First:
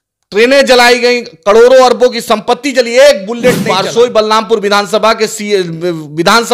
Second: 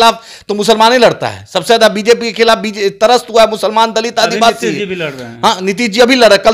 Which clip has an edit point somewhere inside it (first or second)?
first